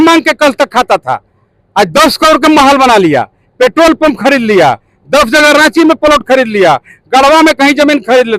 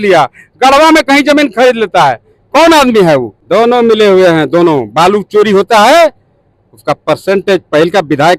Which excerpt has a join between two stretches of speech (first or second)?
second